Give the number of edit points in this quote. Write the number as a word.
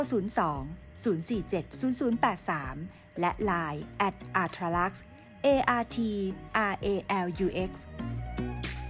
one